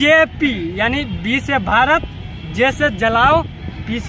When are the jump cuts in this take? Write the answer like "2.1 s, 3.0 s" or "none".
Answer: none